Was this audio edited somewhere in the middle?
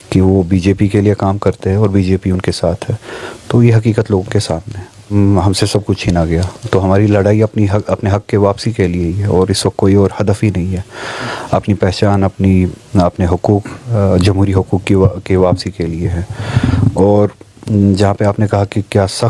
no; 0 cuts

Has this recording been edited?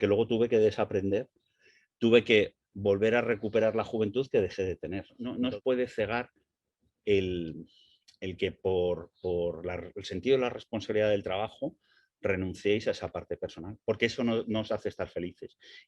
yes; 1 cut; at 5.2 s

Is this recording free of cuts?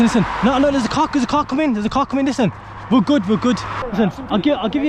no; 1 cut; at 3.8 s

